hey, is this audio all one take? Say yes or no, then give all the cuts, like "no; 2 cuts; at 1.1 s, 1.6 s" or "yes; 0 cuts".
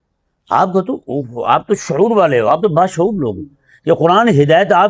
yes; 0 cuts